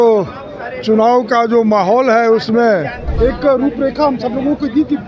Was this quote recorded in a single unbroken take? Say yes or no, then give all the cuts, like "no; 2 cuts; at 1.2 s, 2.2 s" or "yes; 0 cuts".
no; 1 cut; at 3.0 s